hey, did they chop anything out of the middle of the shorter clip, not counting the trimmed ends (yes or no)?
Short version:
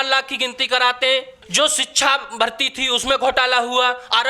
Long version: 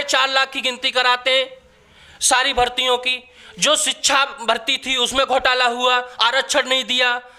yes